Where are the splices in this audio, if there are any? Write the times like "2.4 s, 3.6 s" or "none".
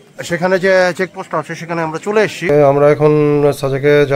2.5 s